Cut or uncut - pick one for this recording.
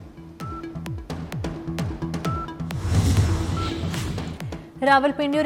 uncut